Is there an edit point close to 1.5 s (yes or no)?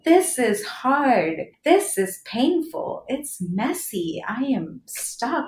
yes